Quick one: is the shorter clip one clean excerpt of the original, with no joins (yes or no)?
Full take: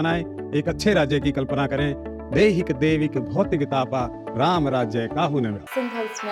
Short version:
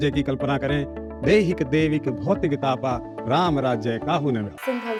yes